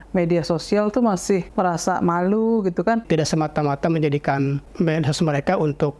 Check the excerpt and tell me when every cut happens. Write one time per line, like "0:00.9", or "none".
0:01.5
0:03.0
0:04.6